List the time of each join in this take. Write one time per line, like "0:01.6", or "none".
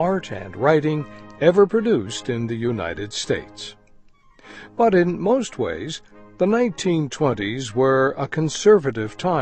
0:05.2